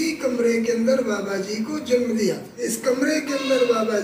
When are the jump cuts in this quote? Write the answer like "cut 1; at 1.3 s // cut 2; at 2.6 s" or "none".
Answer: cut 1; at 2.5 s